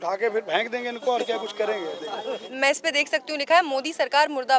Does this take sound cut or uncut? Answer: cut